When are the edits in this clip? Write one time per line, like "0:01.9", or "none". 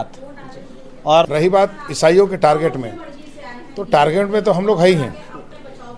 0:01.3